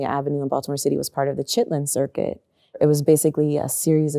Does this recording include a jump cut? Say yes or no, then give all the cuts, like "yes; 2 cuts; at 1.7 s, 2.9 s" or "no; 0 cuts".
yes; 1 cut; at 2.8 s